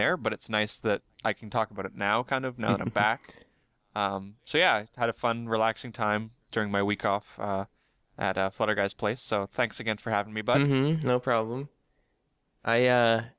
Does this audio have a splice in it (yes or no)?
yes